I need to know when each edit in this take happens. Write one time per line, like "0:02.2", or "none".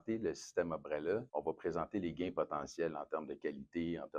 0:01.3